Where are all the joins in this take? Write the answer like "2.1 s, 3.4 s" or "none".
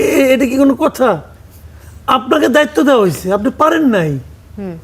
none